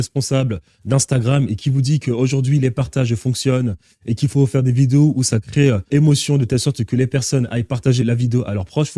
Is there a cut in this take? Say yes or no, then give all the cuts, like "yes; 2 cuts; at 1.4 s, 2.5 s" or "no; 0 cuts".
yes; 2 cuts; at 5.9 s, 8.0 s